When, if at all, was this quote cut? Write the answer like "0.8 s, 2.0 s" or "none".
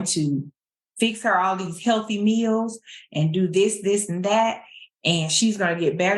none